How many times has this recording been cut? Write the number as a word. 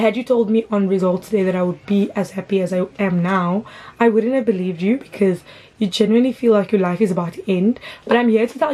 zero